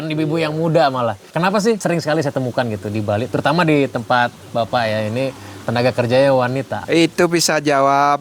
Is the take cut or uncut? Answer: cut